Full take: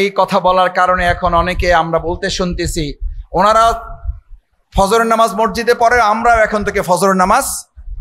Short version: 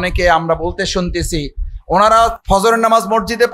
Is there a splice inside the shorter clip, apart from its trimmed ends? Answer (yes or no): yes